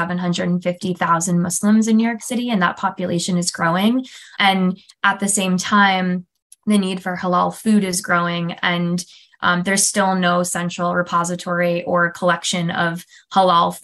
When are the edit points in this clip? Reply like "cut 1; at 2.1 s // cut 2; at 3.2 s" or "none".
none